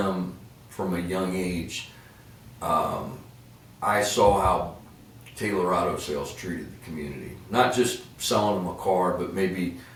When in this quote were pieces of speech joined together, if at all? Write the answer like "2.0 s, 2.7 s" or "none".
none